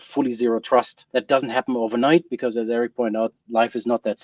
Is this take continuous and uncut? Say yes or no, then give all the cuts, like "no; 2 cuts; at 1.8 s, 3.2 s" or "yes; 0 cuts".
no; 1 cut; at 1.0 s